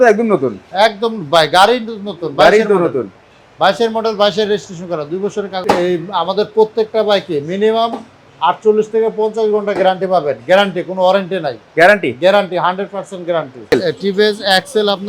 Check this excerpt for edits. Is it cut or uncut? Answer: cut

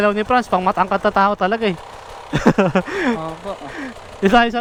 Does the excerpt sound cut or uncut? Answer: uncut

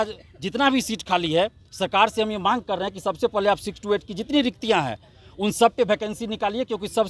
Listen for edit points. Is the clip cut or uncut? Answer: uncut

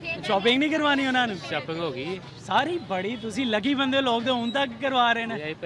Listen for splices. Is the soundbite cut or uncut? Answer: uncut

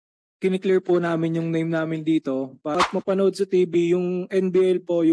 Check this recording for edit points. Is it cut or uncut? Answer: cut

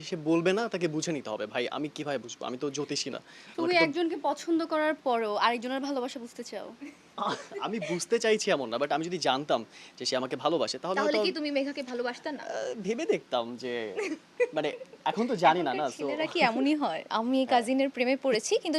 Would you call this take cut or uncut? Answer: cut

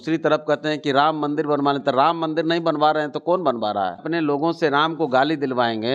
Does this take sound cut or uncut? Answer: cut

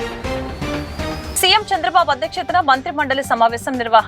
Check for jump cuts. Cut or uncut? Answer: cut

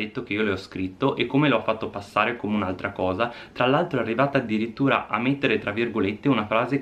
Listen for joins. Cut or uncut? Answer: uncut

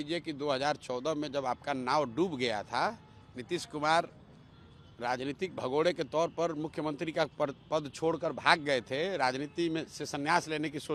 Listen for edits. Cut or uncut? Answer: uncut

